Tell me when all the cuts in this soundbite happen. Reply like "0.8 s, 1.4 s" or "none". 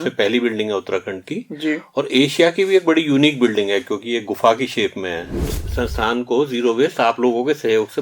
5.5 s